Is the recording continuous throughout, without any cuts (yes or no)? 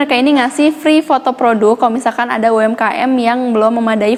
yes